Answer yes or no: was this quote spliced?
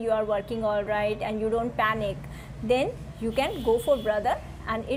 no